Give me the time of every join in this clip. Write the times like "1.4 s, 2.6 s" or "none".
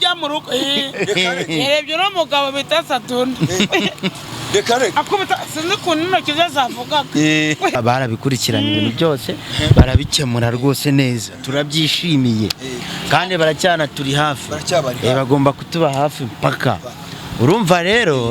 7.8 s